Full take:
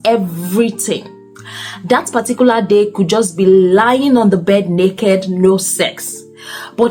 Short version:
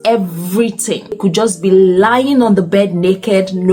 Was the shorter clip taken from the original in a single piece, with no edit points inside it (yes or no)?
no